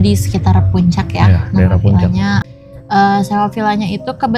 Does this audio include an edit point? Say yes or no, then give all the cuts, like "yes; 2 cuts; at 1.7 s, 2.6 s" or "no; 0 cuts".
yes; 1 cut; at 2.5 s